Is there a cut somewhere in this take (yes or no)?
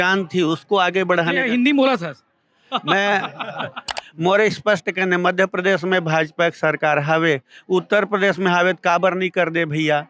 yes